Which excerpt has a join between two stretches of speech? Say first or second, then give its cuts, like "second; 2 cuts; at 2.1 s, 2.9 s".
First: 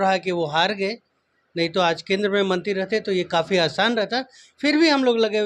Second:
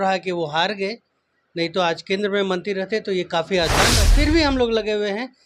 second; 1 cut; at 4.0 s